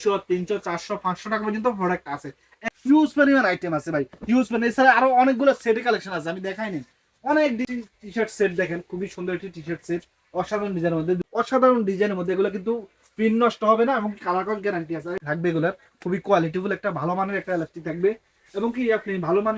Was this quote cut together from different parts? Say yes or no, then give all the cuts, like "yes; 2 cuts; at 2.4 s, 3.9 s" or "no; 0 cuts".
yes; 4 cuts; at 2.5 s, 7.7 s, 11.2 s, 15.2 s